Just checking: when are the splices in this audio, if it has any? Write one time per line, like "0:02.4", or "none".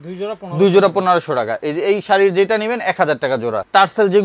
none